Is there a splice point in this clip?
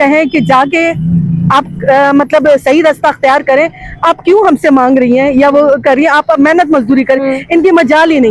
no; 0 cuts

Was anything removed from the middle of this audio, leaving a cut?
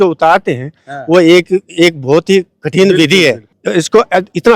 yes; 1 cut; at 3.5 s

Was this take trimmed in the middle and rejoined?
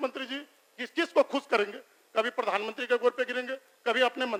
no; 0 cuts

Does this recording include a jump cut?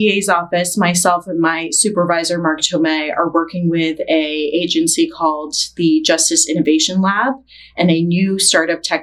no; 0 cuts

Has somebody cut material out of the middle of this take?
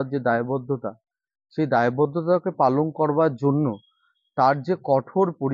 no; 0 cuts

